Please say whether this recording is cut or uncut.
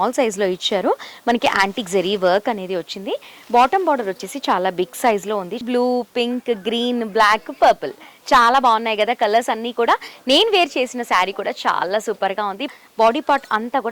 cut